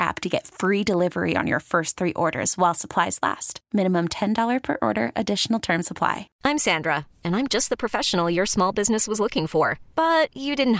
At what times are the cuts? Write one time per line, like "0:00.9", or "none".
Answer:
0:06.3